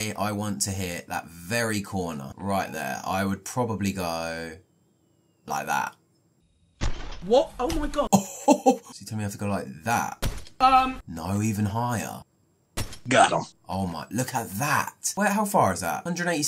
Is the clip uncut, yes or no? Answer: yes